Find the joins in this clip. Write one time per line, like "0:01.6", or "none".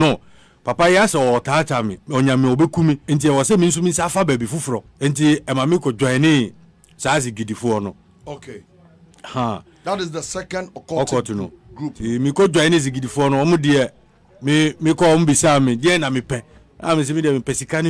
0:03.0
0:04.9